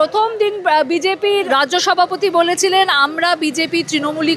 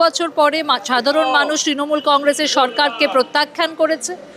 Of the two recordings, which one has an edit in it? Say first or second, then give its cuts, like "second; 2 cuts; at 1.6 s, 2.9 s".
first; 1 cut; at 1.5 s